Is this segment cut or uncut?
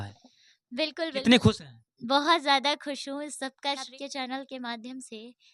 cut